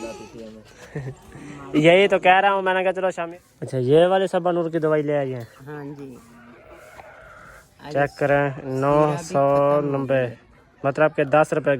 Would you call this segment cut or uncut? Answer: cut